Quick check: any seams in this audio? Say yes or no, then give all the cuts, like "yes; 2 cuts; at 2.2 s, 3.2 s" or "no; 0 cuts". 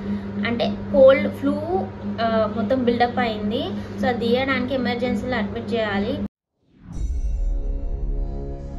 no; 0 cuts